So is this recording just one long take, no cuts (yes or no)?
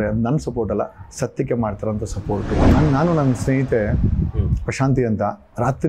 no